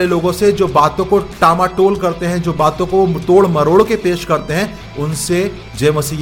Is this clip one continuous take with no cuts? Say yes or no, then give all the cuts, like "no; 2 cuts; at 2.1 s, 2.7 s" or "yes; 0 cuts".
yes; 0 cuts